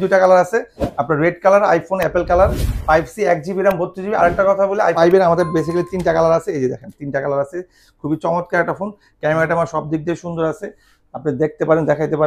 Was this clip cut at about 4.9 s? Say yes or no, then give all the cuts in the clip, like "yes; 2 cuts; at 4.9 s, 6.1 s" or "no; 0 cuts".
yes; 1 cut; at 4.9 s